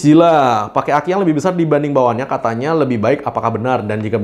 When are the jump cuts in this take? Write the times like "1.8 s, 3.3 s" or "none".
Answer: none